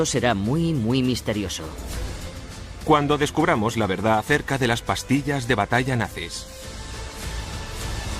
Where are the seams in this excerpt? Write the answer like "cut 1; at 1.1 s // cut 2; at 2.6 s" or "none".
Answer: cut 1; at 6.0 s